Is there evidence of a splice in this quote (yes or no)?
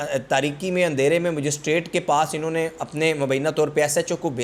no